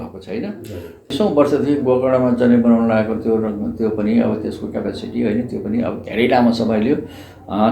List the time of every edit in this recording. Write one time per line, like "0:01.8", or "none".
0:01.1